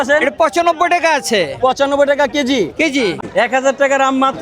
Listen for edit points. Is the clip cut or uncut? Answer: cut